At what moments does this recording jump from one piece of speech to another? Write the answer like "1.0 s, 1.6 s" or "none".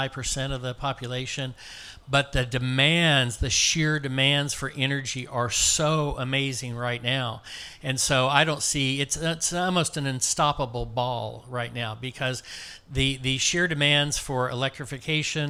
none

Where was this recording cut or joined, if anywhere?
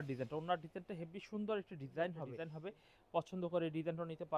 2.4 s

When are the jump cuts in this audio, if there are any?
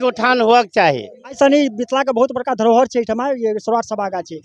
1.4 s

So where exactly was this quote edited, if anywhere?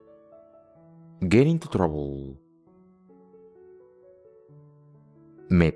none

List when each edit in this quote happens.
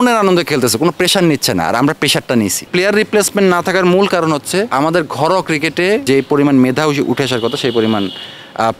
2.6 s, 4.7 s, 6.0 s

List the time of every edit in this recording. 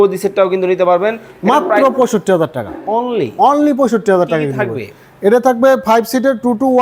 none

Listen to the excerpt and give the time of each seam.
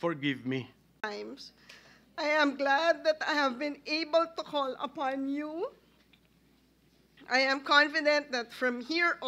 1.0 s

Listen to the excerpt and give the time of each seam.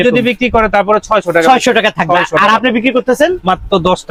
none

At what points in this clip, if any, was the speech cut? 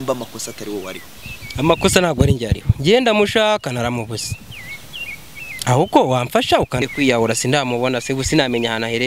6.8 s

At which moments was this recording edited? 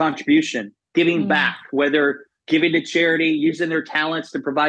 none

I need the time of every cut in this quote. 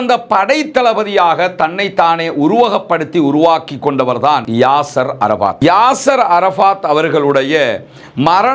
5.6 s

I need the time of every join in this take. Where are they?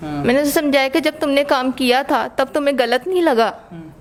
none

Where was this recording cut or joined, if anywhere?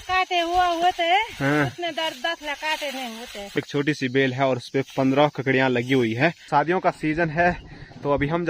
3.6 s, 6.4 s

